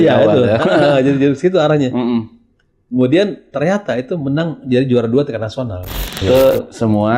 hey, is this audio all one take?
no; 1 cut; at 6.2 s

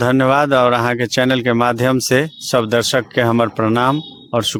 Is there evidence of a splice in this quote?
no; 0 cuts

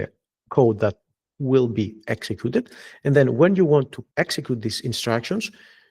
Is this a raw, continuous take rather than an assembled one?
no; 1 cut; at 4.0 s

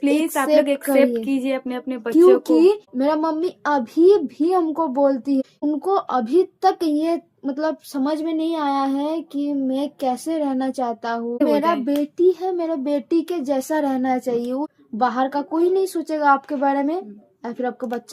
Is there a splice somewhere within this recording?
yes; 4 cuts; at 2.9 s, 5.5 s, 11.4 s, 14.7 s

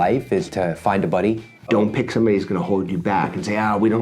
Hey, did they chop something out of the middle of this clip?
yes; 1 cut; at 1.7 s

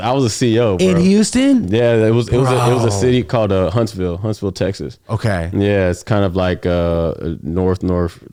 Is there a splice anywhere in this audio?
no; 0 cuts

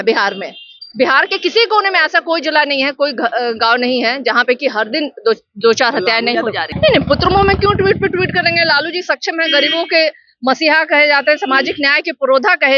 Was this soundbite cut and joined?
yes; 1 cut; at 6.7 s

